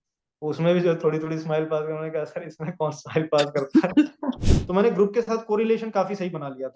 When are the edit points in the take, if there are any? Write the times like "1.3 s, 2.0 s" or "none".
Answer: 4.4 s